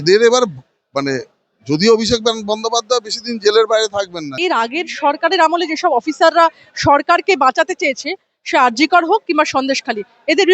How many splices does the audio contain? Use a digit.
1